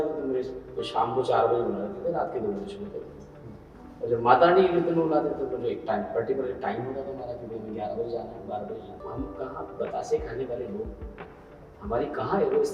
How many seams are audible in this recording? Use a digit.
1